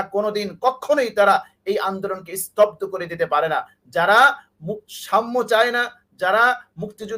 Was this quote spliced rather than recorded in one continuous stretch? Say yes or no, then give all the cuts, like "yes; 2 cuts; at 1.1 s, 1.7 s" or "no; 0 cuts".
no; 0 cuts